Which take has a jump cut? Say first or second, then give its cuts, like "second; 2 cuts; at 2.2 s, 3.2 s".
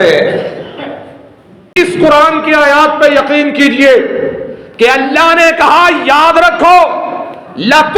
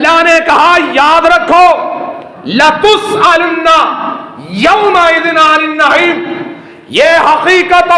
first; 1 cut; at 1.7 s